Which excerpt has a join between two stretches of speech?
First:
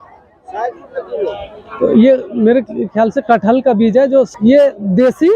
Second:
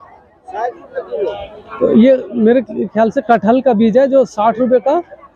first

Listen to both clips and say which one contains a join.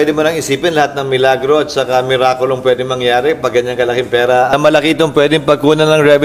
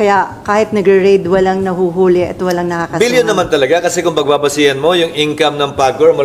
first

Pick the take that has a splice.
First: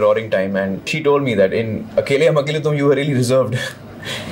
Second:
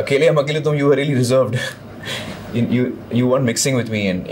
first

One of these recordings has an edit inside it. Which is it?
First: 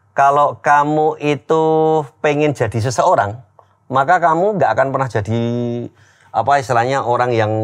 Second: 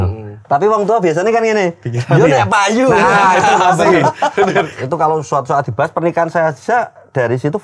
second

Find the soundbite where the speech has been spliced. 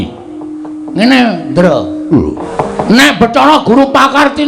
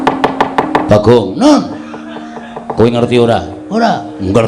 first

